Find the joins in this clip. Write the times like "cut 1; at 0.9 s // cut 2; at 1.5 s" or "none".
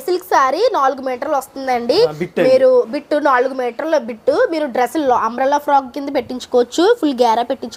none

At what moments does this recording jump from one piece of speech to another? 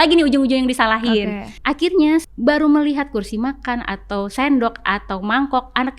cut 1; at 1.5 s // cut 2; at 2.2 s

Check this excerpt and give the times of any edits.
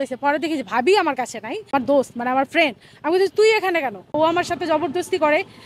cut 1; at 1.7 s // cut 2; at 4.1 s

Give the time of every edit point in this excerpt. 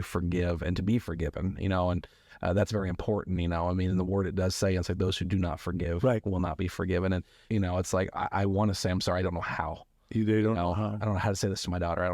cut 1; at 7.3 s

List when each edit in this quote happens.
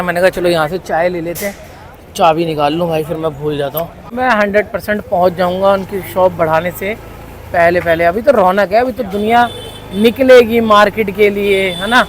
cut 1; at 4.0 s

